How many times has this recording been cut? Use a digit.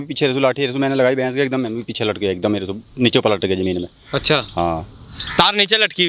0